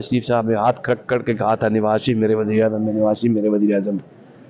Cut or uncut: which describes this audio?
uncut